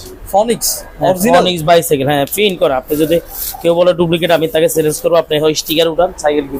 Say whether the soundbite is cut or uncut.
uncut